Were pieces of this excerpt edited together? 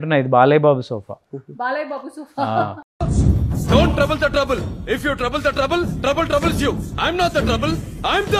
no; 0 cuts

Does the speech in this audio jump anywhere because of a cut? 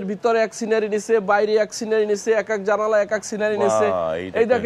no; 0 cuts

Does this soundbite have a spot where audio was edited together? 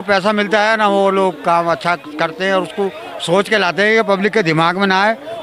no; 0 cuts

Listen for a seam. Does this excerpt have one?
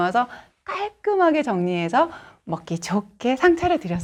no; 0 cuts

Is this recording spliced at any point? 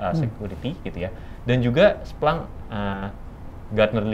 no; 0 cuts

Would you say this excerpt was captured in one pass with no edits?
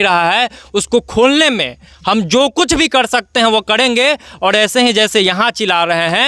yes; 0 cuts

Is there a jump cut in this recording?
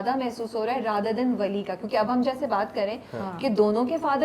no; 0 cuts

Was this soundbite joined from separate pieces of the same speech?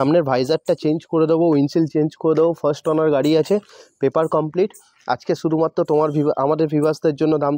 no; 0 cuts

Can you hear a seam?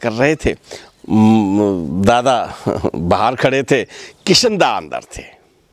no; 0 cuts

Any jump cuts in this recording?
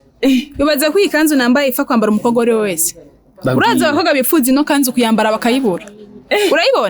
no; 0 cuts

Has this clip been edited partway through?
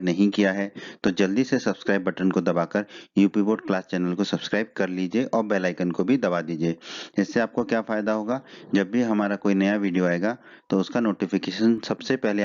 no; 0 cuts

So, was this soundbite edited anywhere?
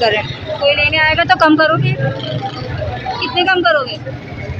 no; 0 cuts

